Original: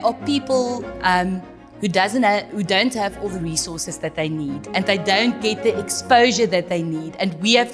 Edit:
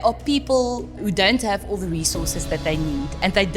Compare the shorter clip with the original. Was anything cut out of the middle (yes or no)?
yes